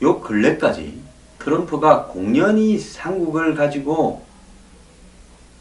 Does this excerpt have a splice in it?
yes; 1 cut; at 2.9 s

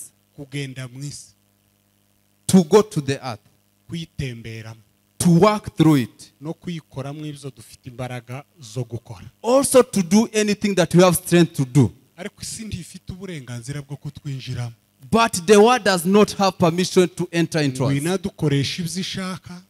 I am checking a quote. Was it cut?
no; 0 cuts

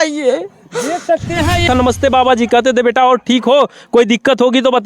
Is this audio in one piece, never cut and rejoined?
no; 1 cut; at 1.6 s

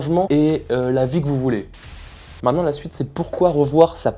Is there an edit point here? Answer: yes; 1 cut; at 1.9 s

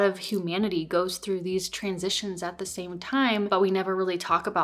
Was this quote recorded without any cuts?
yes; 0 cuts

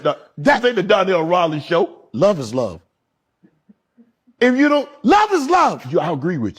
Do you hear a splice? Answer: no; 0 cuts

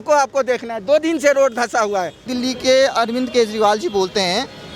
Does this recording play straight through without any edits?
no; 1 cut; at 2.3 s

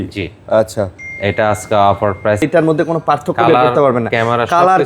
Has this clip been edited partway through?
yes; 1 cut; at 2.4 s

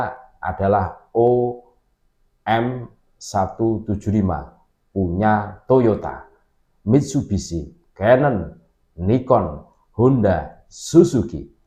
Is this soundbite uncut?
yes; 0 cuts

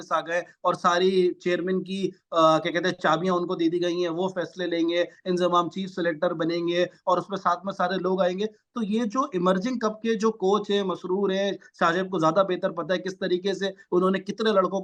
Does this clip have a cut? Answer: no; 0 cuts

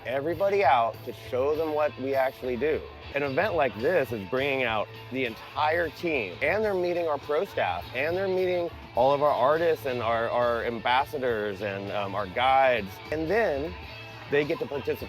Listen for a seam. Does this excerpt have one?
yes; 3 cuts; at 3.1 s, 6.3 s, 13.1 s

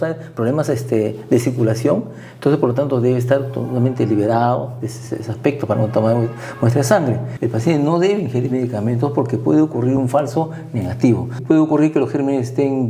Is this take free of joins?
no; 2 cuts; at 7.3 s, 11.3 s

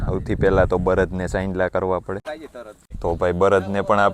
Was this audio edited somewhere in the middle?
yes; 1 cut; at 2.3 s

